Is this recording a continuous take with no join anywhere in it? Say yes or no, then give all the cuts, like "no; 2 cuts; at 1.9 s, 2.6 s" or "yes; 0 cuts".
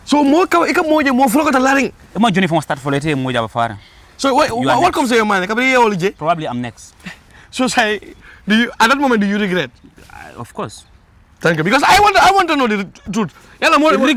yes; 0 cuts